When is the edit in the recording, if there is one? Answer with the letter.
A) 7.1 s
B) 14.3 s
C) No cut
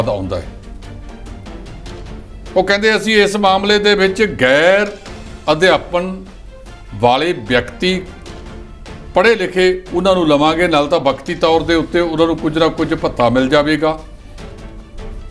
C